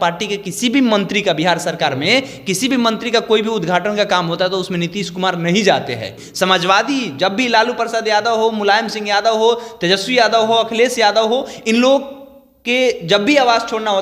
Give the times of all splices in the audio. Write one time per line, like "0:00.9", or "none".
0:06.2

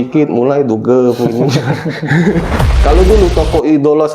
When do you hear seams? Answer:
0:02.5

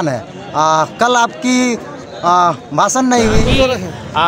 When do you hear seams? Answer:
0:03.4

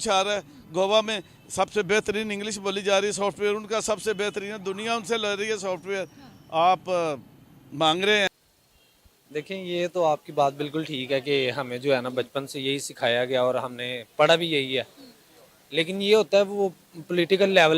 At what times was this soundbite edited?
0:08.3

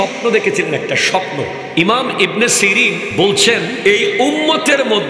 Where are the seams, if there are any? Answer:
0:01.6
0:03.1
0:03.7

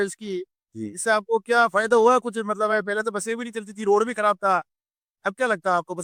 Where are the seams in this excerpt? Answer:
none

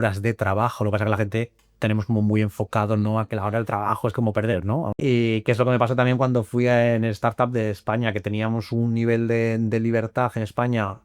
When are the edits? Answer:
0:04.9

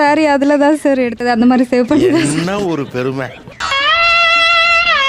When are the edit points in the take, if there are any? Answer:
none

